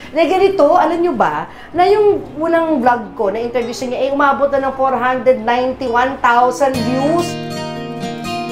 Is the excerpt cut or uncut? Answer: uncut